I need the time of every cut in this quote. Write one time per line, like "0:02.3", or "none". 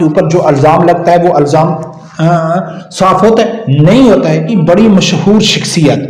0:04.5

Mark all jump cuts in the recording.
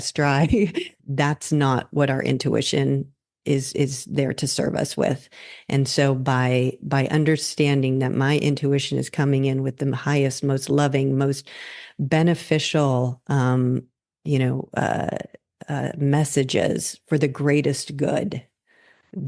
0:01.0

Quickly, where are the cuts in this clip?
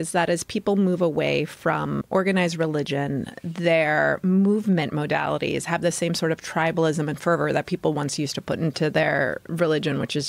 0:02.0
0:09.4

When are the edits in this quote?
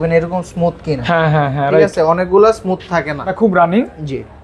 0:03.3

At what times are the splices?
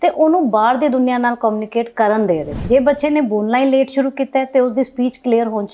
0:02.5

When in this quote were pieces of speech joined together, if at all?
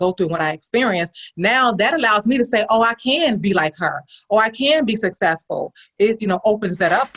0:06.2

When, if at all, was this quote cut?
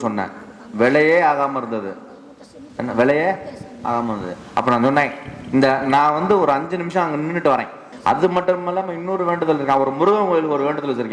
0:07.9

